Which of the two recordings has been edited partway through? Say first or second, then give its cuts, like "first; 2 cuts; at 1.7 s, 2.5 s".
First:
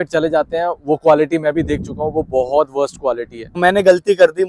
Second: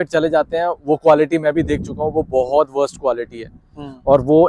first; 1 cut; at 3.6 s